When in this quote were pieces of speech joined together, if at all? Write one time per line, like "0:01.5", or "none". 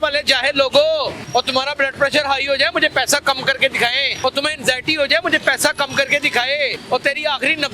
0:01.2
0:04.1
0:06.8